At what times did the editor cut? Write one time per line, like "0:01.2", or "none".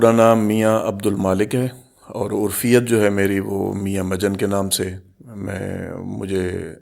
none